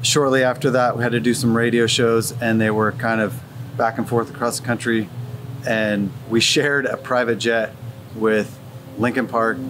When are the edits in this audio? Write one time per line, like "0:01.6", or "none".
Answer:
0:01.0